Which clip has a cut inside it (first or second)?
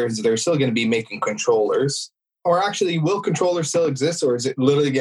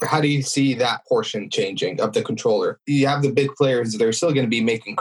second